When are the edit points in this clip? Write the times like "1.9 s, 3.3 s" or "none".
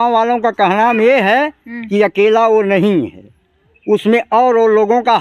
none